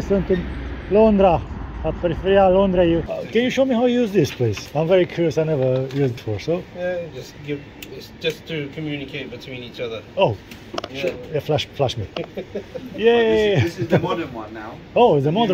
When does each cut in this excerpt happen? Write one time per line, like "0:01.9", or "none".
0:03.1
0:04.6
0:06.2